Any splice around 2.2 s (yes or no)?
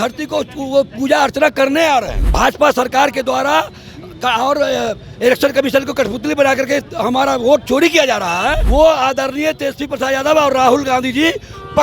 yes